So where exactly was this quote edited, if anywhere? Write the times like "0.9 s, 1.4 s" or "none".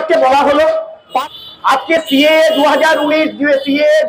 1.1 s